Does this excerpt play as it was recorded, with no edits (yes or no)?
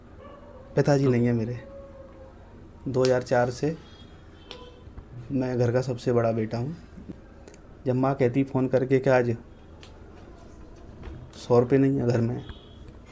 no